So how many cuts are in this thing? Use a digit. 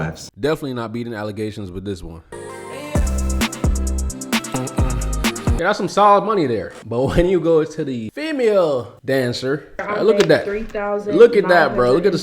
3